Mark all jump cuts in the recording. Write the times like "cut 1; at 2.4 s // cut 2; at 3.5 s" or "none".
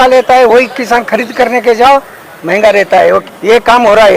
cut 1; at 3.2 s